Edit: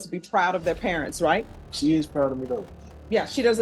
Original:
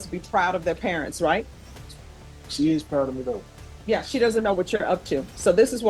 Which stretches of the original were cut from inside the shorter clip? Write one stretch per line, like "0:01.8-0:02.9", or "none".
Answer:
0:01.6-0:02.4